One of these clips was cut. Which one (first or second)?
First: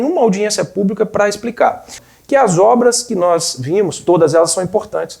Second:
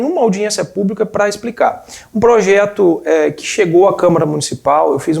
first